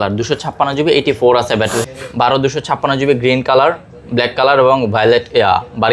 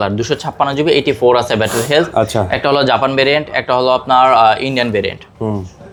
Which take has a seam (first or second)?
first